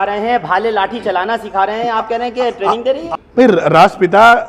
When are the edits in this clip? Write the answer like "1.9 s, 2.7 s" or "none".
3.1 s